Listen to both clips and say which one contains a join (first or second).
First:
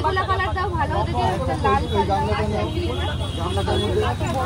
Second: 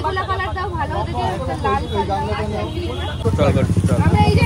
second